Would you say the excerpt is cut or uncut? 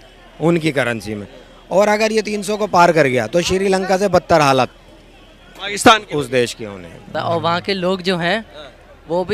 cut